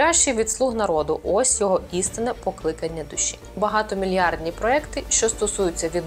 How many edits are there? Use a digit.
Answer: 1